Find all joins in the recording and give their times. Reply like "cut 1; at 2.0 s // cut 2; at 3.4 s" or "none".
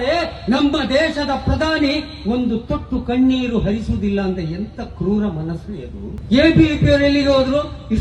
cut 1; at 6.1 s